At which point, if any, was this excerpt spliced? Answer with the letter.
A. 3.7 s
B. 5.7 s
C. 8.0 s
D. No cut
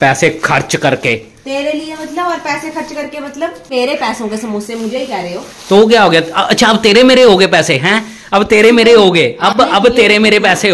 A